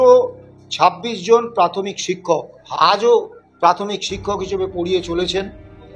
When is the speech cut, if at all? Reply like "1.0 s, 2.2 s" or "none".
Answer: 2.5 s